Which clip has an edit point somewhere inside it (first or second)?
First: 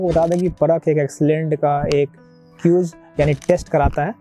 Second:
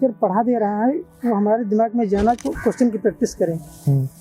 second